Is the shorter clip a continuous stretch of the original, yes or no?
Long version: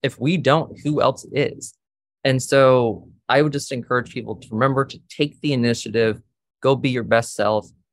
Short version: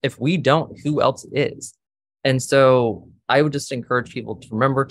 yes